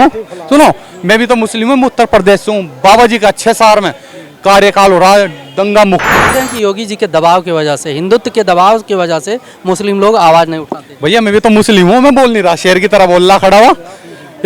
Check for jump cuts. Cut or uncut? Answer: cut